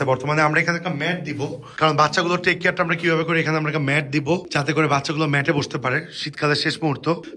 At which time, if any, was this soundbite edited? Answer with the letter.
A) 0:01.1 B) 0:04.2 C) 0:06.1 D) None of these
D